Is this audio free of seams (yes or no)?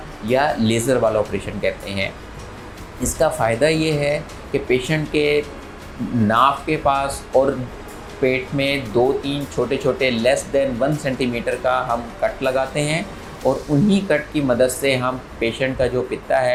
yes